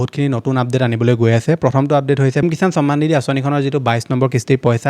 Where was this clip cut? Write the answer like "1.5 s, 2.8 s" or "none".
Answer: 2.4 s